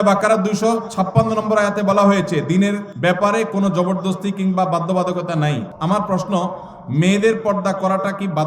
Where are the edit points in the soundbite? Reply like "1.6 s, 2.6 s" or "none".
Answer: 2.9 s, 5.7 s